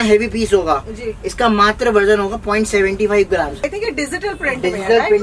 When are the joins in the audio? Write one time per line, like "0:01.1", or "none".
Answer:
0:03.6